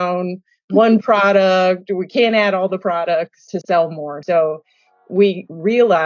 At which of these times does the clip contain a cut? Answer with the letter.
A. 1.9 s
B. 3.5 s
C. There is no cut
B